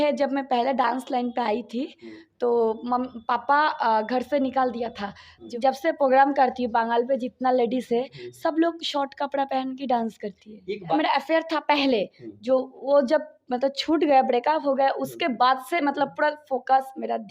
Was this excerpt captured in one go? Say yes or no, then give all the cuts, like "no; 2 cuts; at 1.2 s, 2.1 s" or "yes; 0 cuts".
no; 2 cuts; at 5.4 s, 11.0 s